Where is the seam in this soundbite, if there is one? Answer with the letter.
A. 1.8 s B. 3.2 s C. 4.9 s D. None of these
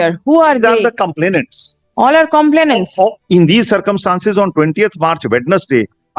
B